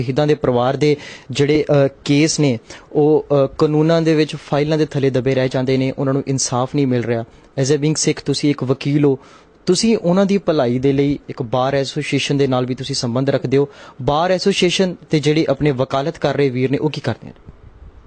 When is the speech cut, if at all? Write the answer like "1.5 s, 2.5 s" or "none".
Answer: 1.1 s